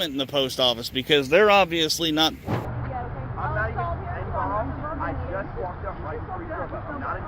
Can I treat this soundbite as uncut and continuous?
no; 1 cut; at 2.5 s

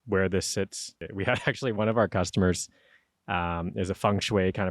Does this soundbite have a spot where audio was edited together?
yes; 1 cut; at 1.0 s

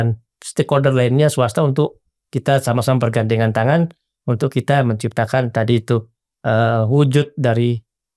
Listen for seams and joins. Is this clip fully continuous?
yes; 0 cuts

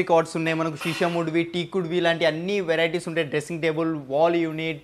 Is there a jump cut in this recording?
no; 0 cuts

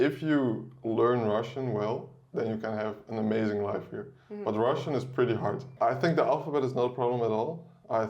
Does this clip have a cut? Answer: yes; 1 cut; at 5.7 s

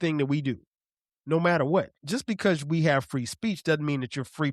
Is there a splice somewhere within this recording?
yes; 1 cut; at 2.0 s

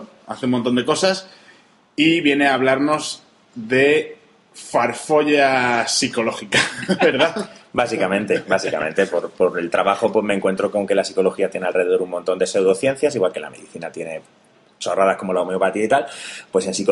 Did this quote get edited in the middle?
no; 0 cuts

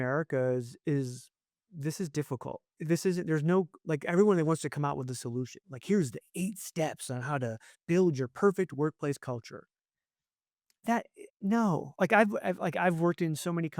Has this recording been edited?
yes; 2 cuts; at 1.7 s, 2.7 s

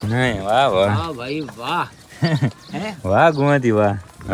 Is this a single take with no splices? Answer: yes; 0 cuts

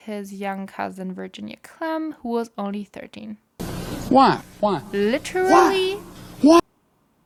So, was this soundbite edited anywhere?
no; 0 cuts

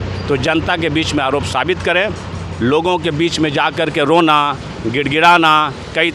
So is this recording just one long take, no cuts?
yes; 0 cuts

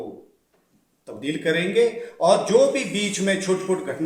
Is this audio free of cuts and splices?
yes; 0 cuts

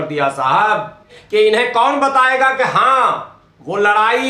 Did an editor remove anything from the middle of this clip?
yes; 1 cut; at 1.1 s

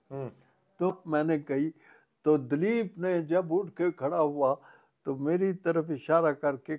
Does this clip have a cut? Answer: yes; 1 cut; at 0.9 s

